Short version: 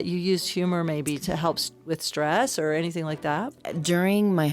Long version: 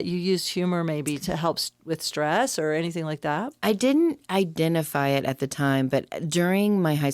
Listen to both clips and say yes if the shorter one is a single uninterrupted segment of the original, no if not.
no